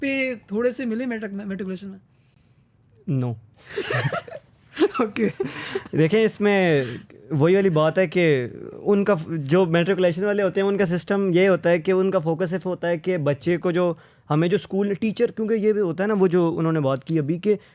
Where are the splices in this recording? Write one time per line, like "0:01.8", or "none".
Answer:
none